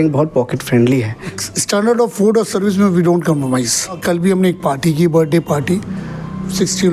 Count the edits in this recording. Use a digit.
2